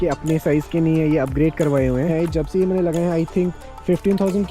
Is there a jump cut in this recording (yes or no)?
yes